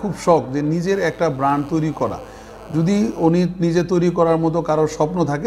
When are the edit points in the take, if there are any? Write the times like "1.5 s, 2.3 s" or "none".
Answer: none